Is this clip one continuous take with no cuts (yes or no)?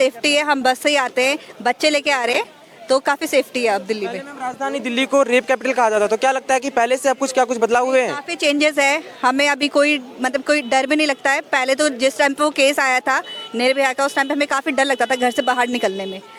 yes